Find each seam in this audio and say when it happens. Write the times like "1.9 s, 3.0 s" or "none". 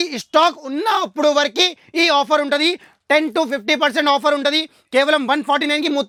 none